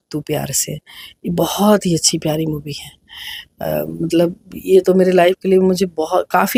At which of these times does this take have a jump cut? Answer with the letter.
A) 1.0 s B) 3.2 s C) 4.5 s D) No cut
D